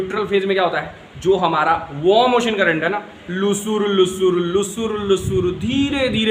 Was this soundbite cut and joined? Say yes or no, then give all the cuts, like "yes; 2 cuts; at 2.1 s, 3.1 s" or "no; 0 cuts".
no; 0 cuts